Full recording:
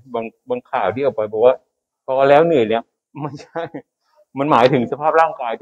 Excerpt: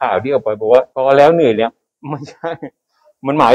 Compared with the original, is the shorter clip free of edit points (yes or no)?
no